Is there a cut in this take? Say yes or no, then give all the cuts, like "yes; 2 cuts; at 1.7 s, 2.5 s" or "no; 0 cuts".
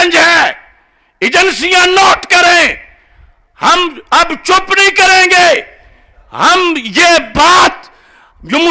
no; 0 cuts